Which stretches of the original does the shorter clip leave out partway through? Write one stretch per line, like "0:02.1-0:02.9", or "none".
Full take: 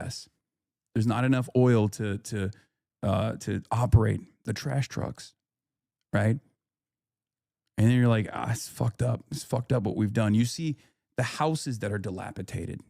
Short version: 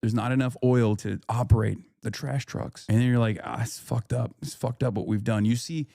0:01.9-0:03.4
0:05.2-0:07.6